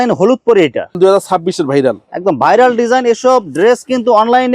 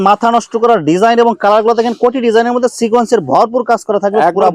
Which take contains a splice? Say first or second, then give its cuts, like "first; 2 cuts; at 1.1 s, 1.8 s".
first; 1 cut; at 1.0 s